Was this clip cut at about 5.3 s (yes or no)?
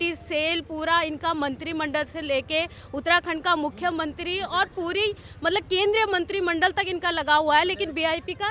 no